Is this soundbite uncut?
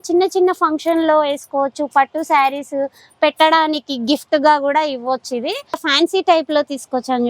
no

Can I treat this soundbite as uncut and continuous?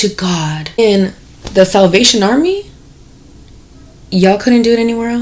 yes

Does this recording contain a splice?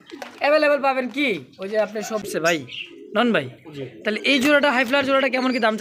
yes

